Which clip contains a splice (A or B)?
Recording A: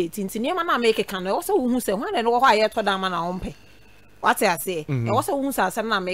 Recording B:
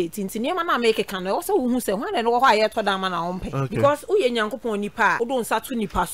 B